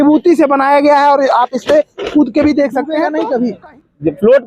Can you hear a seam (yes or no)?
yes